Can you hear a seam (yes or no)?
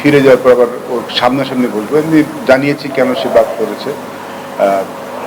no